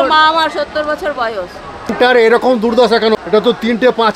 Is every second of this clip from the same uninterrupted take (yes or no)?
no